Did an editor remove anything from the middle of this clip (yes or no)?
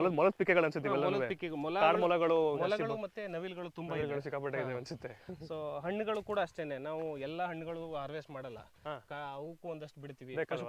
no